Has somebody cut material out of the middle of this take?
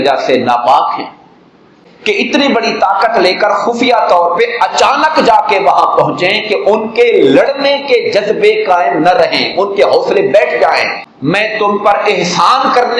yes; 2 cuts; at 1.9 s, 11.0 s

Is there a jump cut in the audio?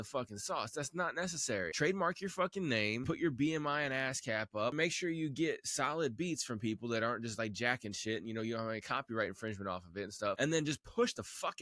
yes; 4 cuts; at 1.7 s, 3.0 s, 4.7 s, 10.4 s

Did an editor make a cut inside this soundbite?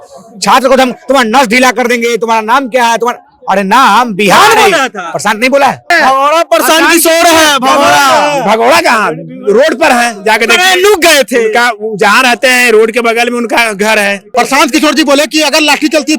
yes; 2 cuts; at 5.9 s, 14.2 s

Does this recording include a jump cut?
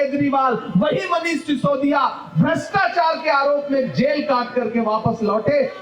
no; 0 cuts

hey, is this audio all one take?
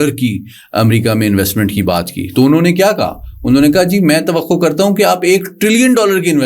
yes; 0 cuts

